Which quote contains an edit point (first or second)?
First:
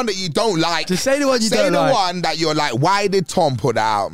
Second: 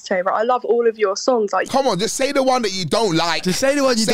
second